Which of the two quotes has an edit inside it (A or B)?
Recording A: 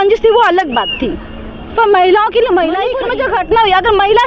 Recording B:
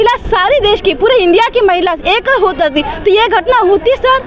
A